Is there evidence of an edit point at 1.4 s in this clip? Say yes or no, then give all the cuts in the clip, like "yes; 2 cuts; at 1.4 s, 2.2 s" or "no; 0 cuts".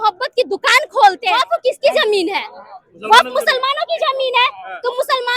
yes; 1 cut; at 1.4 s